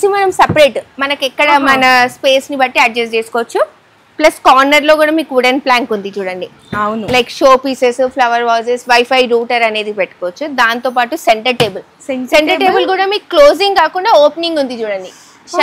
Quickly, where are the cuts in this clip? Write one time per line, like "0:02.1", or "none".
none